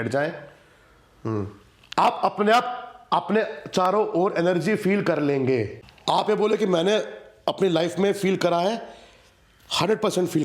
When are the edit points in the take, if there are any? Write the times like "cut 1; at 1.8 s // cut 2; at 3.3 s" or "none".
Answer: cut 1; at 5.7 s

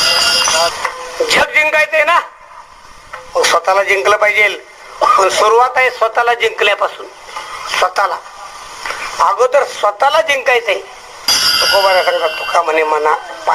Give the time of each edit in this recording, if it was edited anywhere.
cut 1; at 0.7 s // cut 2; at 11.3 s

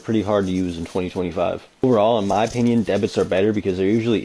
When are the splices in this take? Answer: cut 1; at 1.7 s

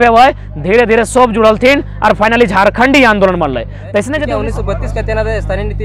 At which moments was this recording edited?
cut 1; at 4.2 s

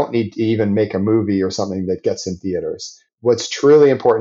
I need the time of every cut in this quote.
cut 1; at 3.1 s

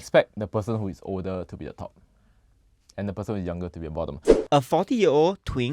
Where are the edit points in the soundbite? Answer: cut 1; at 4.2 s

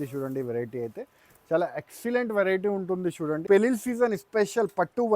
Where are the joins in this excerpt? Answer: cut 1; at 3.4 s

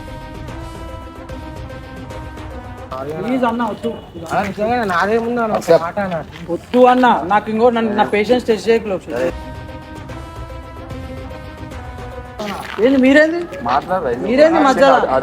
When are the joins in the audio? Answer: none

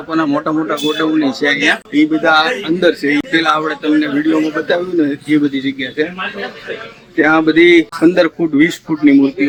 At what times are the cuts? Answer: none

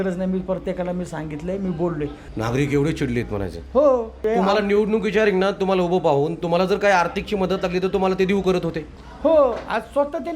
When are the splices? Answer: cut 1; at 2.2 s // cut 2; at 4.2 s

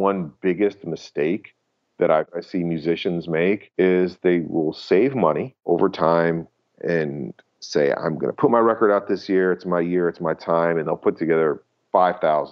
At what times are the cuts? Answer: cut 1; at 2.3 s // cut 2; at 3.7 s // cut 3; at 5.5 s

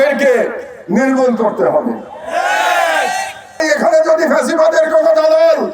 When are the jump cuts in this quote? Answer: cut 1; at 3.6 s

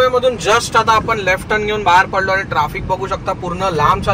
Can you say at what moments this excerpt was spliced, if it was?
none

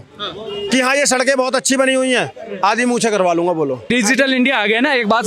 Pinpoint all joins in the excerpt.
cut 1; at 3.8 s

